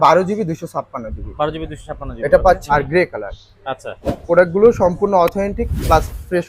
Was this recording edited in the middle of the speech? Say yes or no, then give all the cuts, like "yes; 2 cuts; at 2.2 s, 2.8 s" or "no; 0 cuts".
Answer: yes; 1 cut; at 2.6 s